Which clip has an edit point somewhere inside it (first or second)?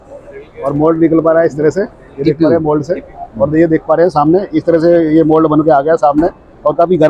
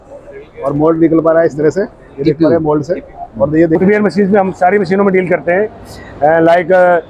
second